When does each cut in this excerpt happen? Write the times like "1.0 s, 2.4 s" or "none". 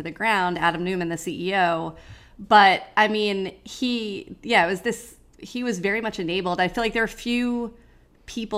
none